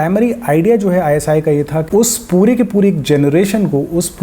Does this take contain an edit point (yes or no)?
yes